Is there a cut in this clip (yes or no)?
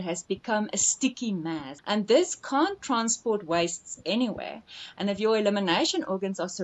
yes